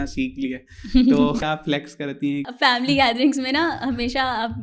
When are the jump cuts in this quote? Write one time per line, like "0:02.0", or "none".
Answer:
0:01.4
0:02.5